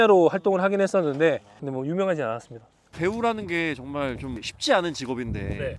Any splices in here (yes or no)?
no